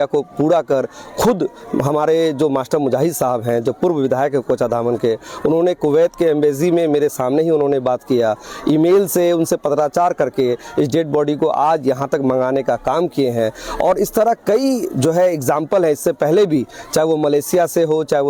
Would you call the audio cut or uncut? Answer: uncut